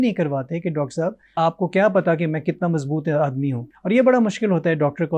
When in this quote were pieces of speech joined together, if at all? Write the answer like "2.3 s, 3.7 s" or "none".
1.4 s, 3.7 s

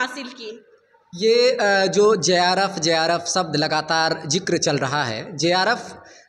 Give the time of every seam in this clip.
none

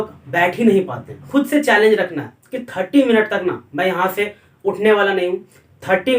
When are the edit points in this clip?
1.3 s

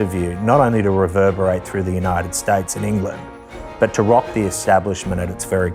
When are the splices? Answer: none

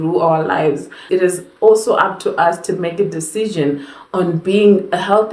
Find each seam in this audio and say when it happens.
1.1 s

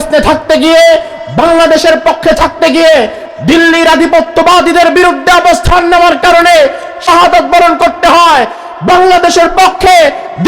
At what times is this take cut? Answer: 7.0 s

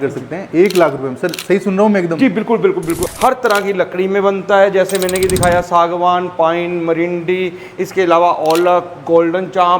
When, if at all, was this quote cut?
3.0 s

